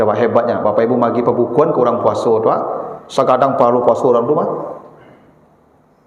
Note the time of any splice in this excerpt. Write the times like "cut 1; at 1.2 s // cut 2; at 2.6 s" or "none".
none